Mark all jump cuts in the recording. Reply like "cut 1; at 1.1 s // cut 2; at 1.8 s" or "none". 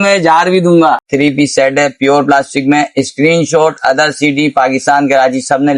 cut 1; at 1.1 s